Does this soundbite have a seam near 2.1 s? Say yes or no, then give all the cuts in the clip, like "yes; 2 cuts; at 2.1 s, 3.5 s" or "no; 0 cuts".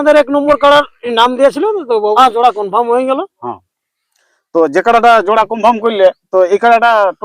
yes; 1 cut; at 2.1 s